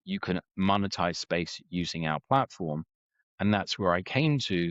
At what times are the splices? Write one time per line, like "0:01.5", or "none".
none